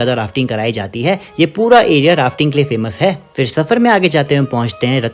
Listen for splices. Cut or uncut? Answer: uncut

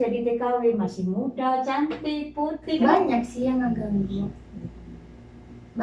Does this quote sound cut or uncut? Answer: cut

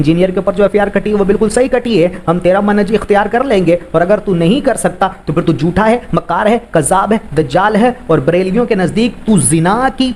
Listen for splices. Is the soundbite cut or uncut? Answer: uncut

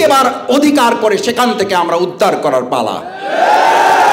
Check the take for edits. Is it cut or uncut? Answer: uncut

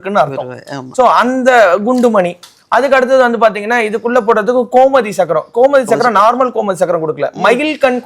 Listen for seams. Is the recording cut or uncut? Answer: uncut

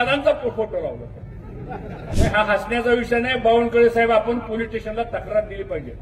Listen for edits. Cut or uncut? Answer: cut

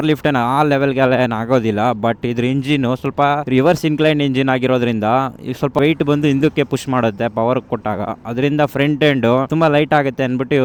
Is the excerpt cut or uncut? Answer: uncut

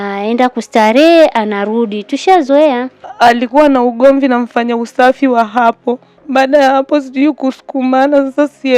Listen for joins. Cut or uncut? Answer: cut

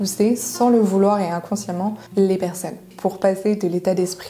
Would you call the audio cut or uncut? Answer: cut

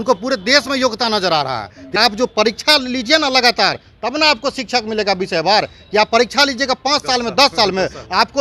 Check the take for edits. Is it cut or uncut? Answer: cut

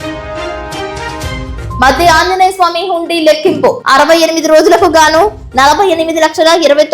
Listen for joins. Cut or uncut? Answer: cut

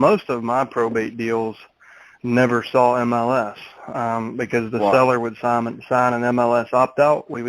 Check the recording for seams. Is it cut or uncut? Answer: uncut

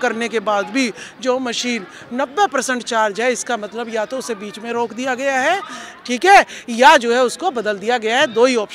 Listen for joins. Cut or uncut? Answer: uncut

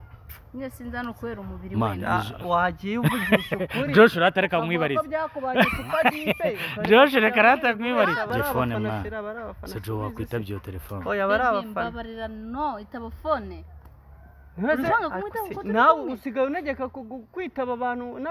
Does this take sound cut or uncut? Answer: cut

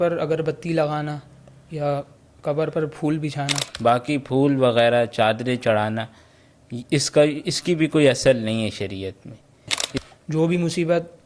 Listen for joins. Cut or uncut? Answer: cut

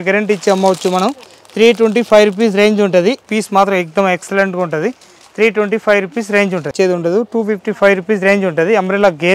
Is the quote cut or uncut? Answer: cut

